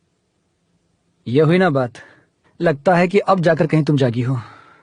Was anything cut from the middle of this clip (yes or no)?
no